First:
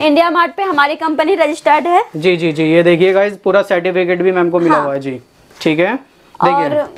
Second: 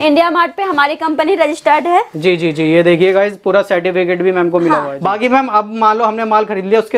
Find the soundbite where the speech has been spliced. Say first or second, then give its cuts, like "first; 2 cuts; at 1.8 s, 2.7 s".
second; 1 cut; at 4.9 s